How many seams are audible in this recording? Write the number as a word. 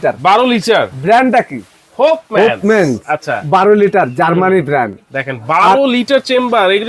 zero